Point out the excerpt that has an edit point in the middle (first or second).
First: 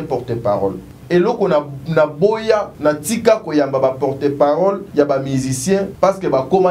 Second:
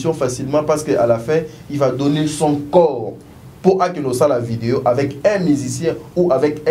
first